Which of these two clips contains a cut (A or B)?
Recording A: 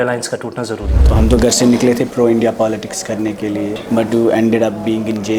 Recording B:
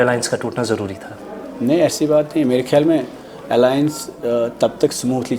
A